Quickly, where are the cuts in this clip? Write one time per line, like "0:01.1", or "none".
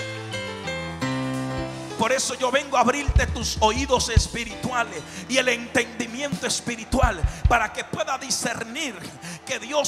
0:01.8